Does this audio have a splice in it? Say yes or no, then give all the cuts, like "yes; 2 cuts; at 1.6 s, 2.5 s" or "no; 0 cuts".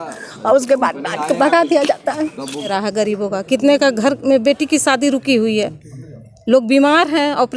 yes; 1 cut; at 2.7 s